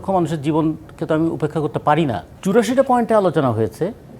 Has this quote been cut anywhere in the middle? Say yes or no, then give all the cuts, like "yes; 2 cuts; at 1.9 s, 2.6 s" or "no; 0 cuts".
yes; 1 cut; at 2.3 s